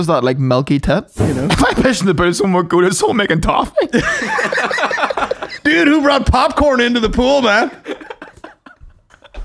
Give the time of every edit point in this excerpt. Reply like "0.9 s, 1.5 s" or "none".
1.2 s